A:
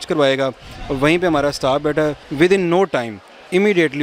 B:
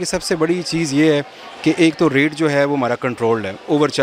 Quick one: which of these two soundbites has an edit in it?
A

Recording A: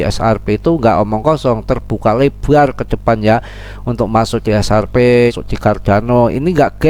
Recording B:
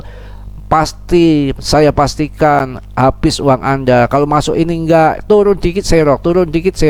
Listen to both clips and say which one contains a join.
A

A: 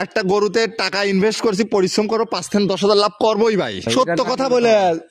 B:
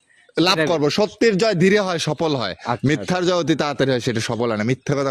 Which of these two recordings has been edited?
A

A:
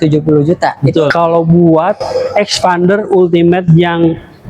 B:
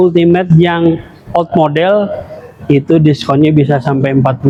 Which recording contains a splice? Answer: A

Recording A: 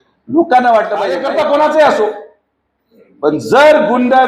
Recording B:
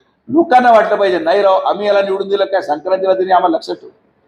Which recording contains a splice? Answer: A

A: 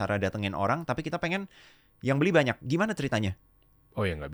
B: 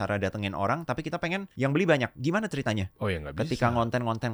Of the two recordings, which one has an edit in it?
B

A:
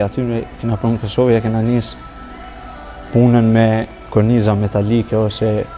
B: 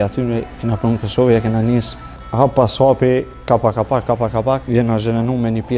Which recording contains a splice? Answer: B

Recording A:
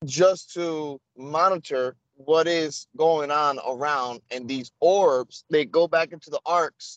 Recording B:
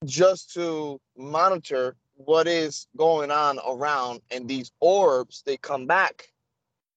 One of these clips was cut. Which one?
A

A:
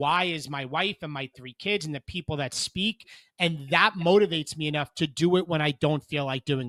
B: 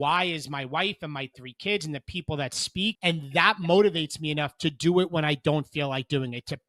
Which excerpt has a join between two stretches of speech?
B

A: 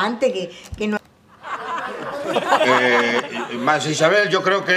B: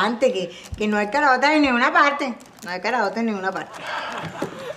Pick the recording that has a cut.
B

